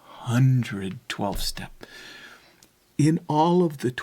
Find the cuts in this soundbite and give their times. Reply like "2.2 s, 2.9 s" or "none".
none